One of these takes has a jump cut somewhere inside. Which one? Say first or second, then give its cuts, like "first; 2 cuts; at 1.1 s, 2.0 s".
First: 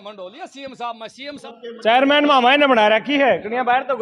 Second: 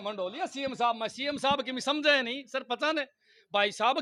first; 1 cut; at 1.4 s